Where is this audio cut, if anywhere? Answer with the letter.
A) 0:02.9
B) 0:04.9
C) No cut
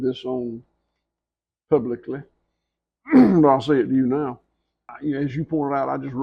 B